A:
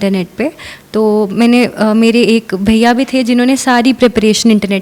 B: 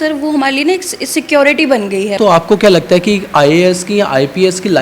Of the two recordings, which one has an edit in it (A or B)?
B